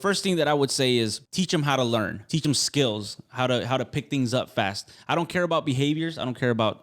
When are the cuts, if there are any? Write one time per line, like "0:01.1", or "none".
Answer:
0:01.2
0:02.4

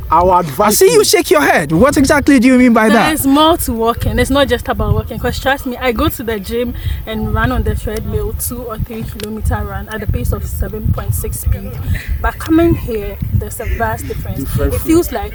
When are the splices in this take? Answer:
none

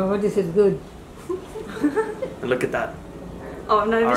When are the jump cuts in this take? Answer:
none

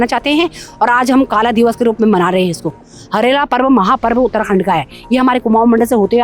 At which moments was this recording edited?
none

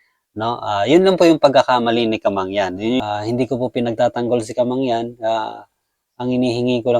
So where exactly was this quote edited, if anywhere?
0:03.1

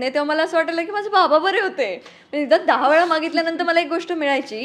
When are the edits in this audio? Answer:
none

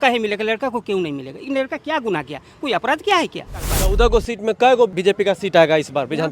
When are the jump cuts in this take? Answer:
0:03.7
0:05.0

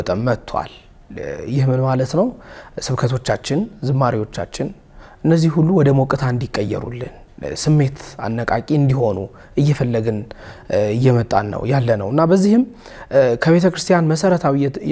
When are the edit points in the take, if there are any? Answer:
none

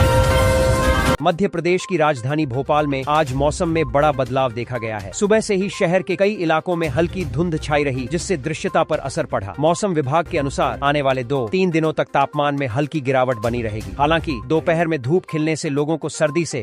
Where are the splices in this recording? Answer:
0:01.2

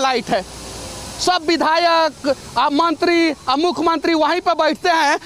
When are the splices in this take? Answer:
none

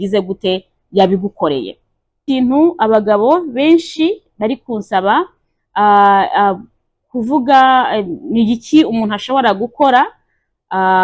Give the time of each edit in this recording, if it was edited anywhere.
0:02.2

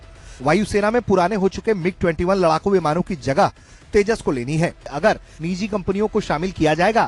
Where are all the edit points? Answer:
0:04.9

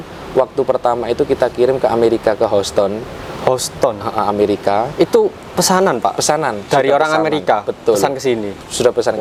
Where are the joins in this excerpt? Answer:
none

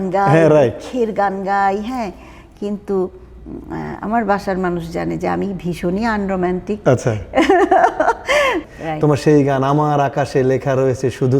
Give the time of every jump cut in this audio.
0:08.6

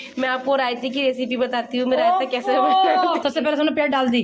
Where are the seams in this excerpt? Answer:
0:03.2

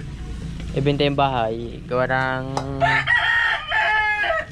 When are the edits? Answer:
none

